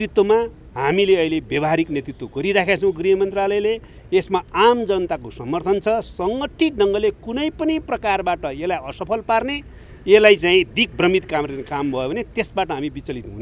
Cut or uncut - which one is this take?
uncut